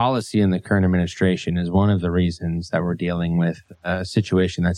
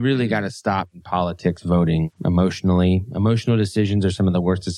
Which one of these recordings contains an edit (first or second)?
second